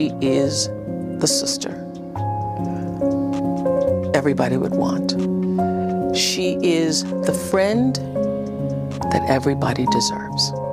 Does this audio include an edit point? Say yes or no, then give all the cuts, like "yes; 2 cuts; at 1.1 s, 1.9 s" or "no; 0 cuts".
no; 0 cuts